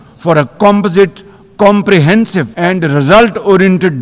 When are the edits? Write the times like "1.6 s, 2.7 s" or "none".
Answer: 2.5 s